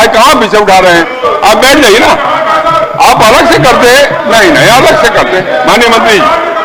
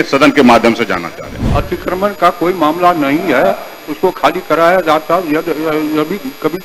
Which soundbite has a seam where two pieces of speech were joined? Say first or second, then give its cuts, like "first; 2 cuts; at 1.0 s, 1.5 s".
second; 1 cut; at 1.4 s